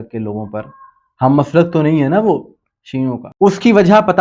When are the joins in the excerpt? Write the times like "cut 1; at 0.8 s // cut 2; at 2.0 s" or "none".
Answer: cut 1; at 3.2 s